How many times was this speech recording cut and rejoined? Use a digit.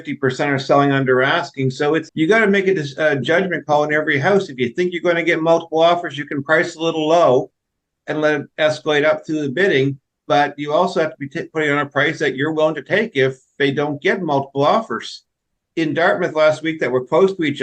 1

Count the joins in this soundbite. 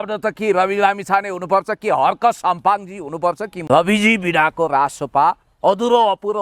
1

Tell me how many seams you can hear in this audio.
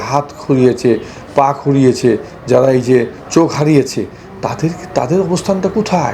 0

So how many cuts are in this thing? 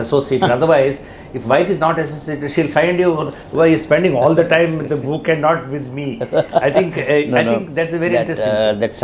0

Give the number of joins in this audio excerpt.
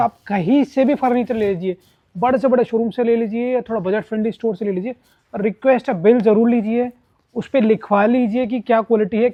0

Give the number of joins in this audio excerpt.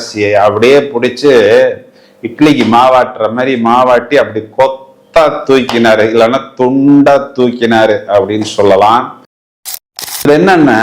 1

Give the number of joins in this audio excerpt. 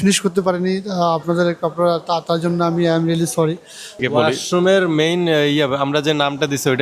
1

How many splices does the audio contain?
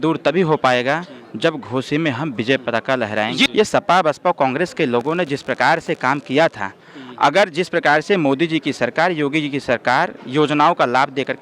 1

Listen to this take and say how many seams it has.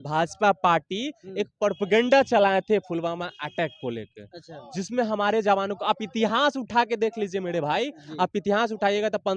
0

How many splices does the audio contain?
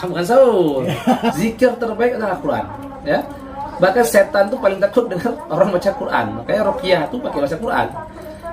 1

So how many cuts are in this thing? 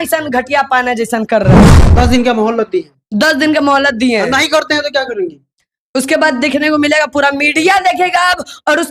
1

